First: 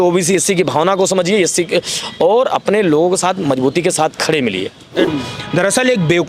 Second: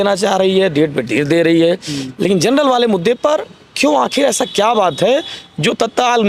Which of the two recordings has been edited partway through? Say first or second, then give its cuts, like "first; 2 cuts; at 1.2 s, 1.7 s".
first; 1 cut; at 5.1 s